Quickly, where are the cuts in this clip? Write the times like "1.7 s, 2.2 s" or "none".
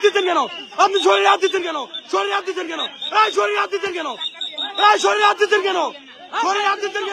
none